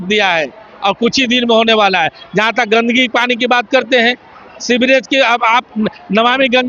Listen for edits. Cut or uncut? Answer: uncut